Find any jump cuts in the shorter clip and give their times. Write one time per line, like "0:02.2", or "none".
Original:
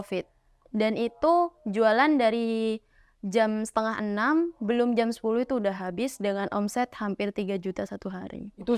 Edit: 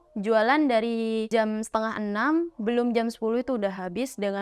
0:01.3